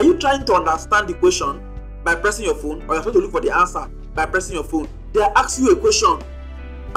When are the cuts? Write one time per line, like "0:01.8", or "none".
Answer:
0:05.0